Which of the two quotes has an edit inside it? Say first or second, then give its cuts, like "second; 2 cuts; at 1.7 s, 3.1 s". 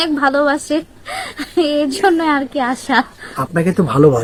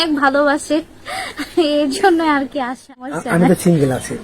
second; 1 cut; at 3.2 s